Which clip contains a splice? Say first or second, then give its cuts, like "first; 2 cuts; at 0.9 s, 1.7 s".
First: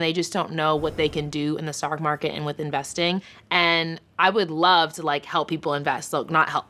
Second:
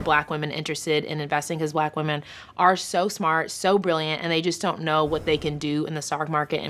first; 1 cut; at 3.3 s